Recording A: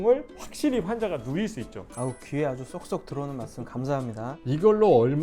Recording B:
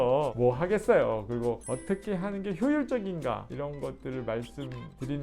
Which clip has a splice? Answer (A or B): B